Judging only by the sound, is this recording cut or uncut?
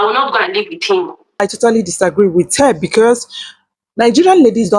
cut